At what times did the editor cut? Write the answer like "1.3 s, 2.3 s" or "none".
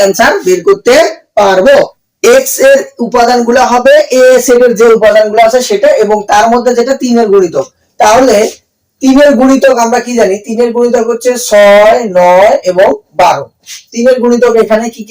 2.0 s